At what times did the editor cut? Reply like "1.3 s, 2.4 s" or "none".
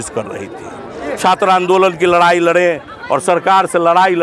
1.2 s